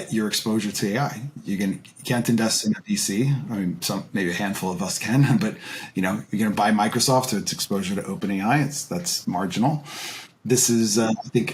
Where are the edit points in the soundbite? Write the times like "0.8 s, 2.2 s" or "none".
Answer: none